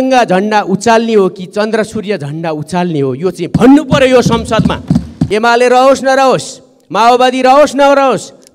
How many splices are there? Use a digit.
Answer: 1